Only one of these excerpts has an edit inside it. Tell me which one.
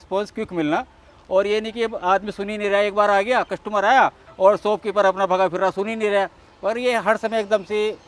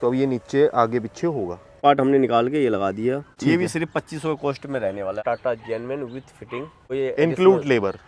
second; 4 cuts; at 1.8 s, 3.3 s, 5.2 s, 6.8 s

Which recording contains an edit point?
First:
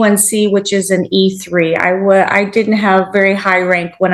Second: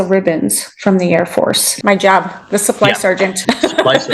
second; 2 cuts; at 1.8 s, 3.4 s

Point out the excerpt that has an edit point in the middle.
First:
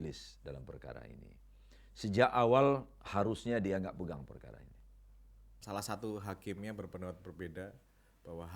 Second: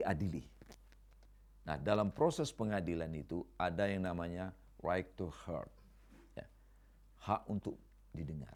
first; 1 cut; at 5.6 s

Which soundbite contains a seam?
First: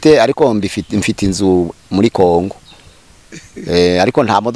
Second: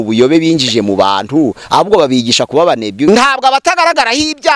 second; 1 cut; at 3.1 s

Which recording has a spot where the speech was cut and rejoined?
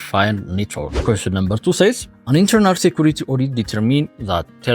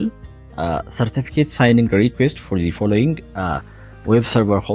first; 2 cuts; at 0.9 s, 2.1 s

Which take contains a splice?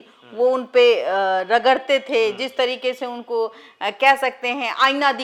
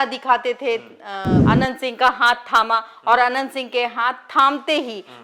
second; 1 cut; at 1.3 s

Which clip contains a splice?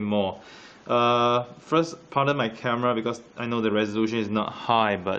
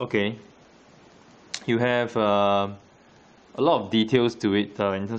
second; 1 cut; at 4.1 s

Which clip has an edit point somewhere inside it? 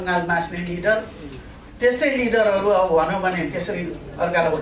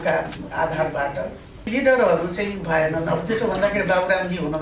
second; 1 cut; at 1.7 s

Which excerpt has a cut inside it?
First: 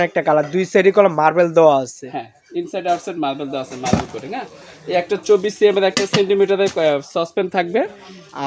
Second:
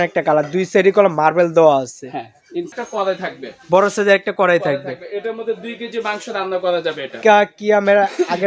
second; 2 cuts; at 2.7 s, 7.2 s

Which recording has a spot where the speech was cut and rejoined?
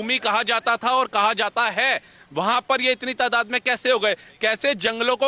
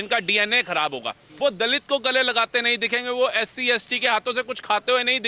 second; 1 cut; at 1.3 s

